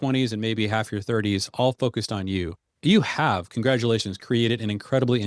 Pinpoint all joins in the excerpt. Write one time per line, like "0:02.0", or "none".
0:02.7